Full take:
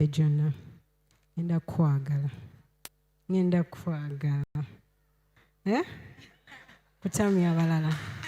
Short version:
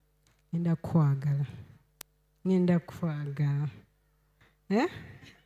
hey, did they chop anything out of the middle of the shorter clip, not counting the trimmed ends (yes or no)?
yes